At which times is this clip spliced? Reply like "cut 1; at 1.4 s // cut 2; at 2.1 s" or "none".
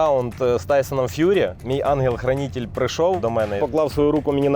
cut 1; at 1.6 s // cut 2; at 3.5 s

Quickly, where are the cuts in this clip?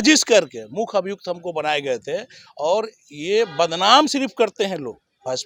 none

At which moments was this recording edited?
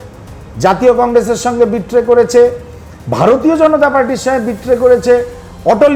none

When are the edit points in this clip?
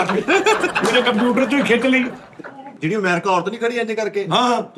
cut 1; at 2.7 s

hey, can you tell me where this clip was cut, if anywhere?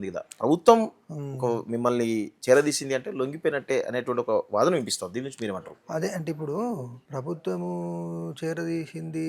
cut 1; at 7.0 s

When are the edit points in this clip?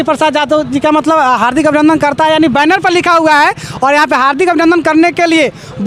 none

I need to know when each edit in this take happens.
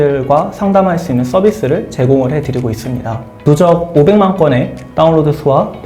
cut 1; at 3.3 s

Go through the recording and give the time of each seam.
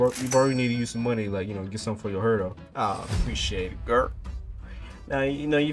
cut 1; at 2.6 s

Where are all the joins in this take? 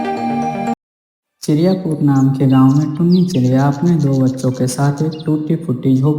cut 1; at 0.9 s

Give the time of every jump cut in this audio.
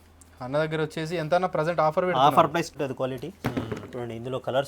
cut 1; at 2.7 s

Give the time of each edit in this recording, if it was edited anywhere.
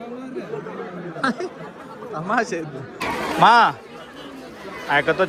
cut 1; at 3.0 s

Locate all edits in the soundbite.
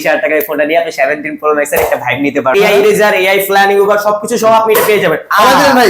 cut 1; at 2.5 s

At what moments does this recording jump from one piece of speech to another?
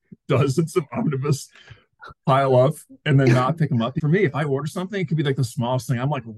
cut 1; at 4.0 s

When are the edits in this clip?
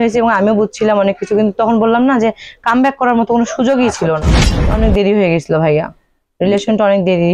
cut 1; at 4.6 s

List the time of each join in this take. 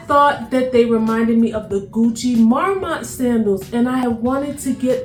none

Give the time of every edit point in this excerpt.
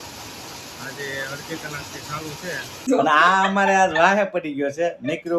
cut 1; at 2.9 s

